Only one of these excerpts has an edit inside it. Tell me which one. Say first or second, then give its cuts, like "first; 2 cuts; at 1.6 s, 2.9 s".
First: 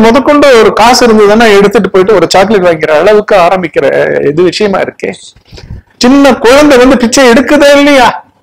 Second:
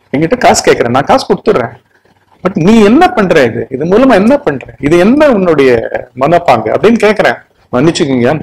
second; 1 cut; at 7.5 s